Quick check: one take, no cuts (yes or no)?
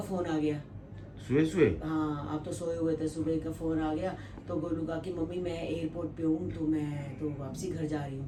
yes